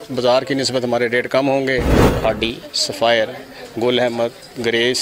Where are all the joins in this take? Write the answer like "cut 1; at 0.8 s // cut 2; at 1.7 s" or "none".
cut 1; at 2.0 s